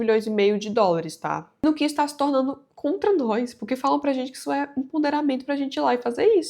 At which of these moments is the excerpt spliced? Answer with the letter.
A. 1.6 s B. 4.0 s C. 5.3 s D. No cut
A